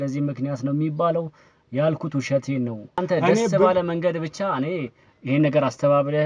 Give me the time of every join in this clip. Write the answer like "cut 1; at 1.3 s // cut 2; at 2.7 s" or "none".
cut 1; at 3.0 s